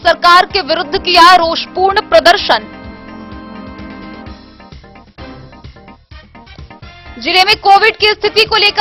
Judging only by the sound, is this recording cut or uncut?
uncut